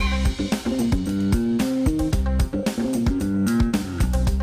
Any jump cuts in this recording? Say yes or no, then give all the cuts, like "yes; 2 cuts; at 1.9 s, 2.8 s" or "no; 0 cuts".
no; 0 cuts